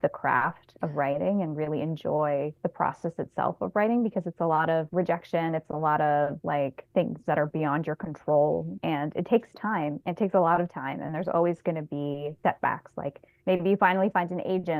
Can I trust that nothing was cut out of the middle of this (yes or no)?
yes